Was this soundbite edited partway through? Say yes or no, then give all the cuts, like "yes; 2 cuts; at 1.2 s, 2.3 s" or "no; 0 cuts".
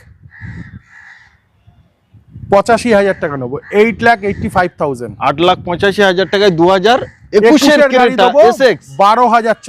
no; 0 cuts